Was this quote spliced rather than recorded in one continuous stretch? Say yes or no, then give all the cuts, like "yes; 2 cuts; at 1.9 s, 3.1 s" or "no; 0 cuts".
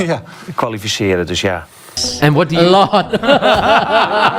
yes; 1 cut; at 2.0 s